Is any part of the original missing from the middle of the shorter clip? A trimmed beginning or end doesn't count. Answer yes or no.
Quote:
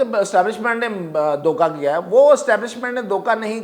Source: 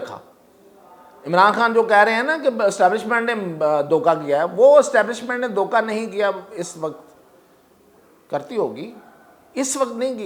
no